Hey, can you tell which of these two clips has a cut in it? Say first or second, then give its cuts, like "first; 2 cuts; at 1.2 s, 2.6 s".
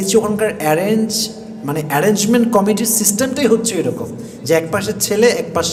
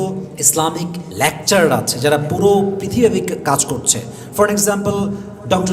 second; 1 cut; at 1.0 s